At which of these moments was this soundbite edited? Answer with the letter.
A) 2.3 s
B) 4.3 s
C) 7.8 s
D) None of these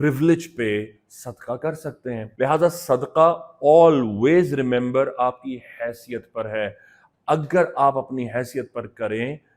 A